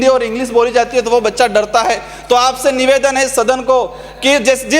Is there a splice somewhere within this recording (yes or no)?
no